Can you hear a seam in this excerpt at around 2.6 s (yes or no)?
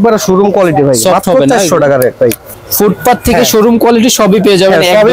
yes